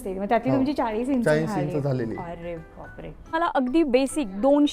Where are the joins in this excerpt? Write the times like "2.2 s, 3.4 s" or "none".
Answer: 3.3 s